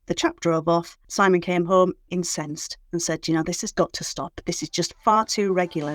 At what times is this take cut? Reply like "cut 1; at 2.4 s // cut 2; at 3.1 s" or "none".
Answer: cut 1; at 1.0 s // cut 2; at 2.0 s // cut 3; at 3.7 s